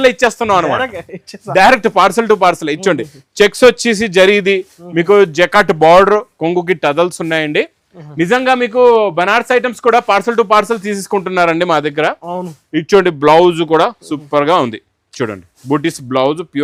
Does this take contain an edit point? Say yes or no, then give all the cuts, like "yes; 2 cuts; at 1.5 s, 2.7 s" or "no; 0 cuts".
no; 0 cuts